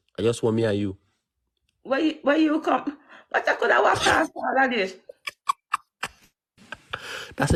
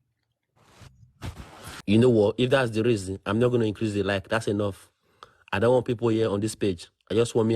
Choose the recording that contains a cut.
second; 1 cut; at 1.6 s

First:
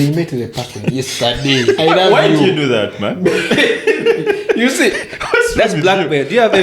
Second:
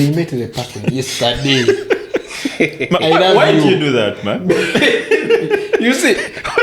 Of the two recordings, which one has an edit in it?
first; 1 cut; at 1.8 s

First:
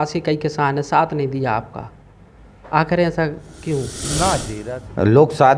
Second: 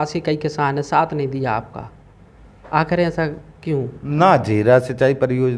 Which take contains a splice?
first; 1 cut; at 4.5 s

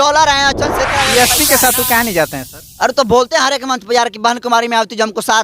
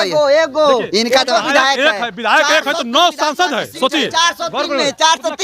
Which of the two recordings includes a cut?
first; 1 cut; at 1.1 s

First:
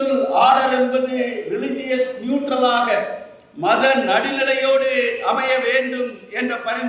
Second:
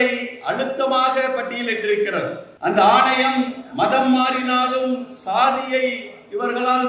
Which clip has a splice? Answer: second; 1 cut; at 2.5 s

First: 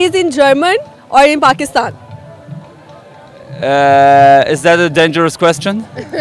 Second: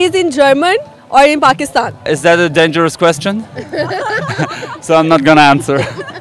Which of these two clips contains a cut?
second; 1 cut; at 2.1 s

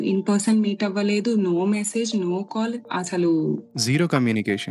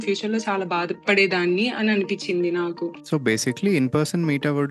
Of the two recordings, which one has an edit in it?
second; 1 cut; at 3.0 s

